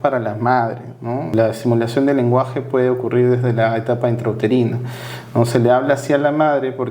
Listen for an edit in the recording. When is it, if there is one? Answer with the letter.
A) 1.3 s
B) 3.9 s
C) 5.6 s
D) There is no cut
A